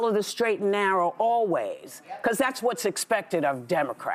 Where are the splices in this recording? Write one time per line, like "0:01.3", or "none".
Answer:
none